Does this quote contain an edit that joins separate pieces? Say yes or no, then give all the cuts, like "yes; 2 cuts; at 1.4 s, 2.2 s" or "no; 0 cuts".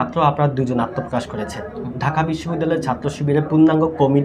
no; 0 cuts